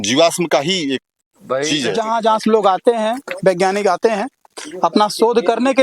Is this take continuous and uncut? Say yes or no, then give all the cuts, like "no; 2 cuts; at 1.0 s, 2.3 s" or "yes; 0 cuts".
no; 1 cut; at 2.0 s